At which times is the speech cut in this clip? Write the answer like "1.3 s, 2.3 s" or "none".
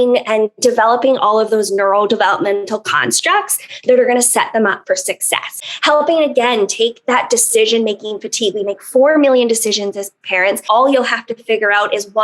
5.7 s, 10.6 s